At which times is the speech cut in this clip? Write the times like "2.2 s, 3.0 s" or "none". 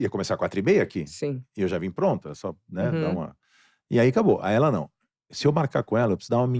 4.6 s